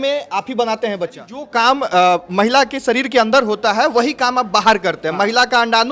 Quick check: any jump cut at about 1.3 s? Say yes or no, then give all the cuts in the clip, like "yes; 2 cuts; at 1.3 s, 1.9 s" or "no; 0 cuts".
yes; 1 cut; at 1.3 s